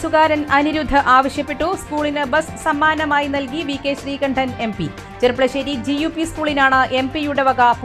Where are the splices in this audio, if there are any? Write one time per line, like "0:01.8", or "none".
none